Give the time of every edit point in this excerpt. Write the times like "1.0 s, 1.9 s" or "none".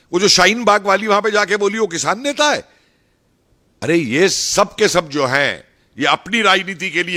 none